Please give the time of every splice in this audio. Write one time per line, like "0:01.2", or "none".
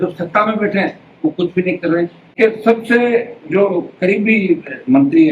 0:02.4

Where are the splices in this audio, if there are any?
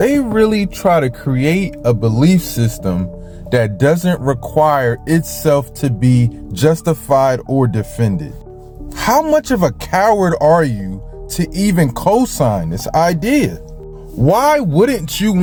none

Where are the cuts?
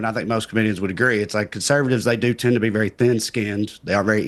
none

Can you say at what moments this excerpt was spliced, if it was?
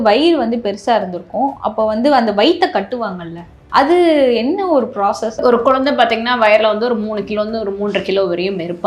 0:05.4

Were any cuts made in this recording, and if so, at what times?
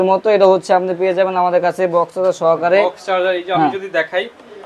none

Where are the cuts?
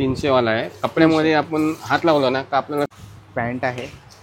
0:02.9

